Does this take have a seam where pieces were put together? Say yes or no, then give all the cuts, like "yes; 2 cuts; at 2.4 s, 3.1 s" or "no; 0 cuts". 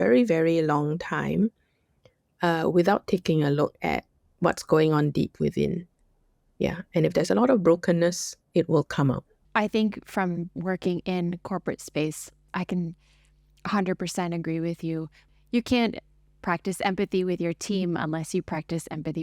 yes; 3 cuts; at 9.4 s, 12.4 s, 15.2 s